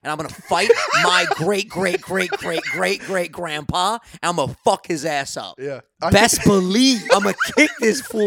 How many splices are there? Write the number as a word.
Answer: two